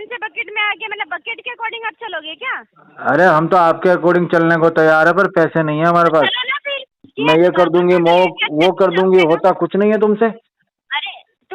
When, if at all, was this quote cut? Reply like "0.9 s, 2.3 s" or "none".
7.1 s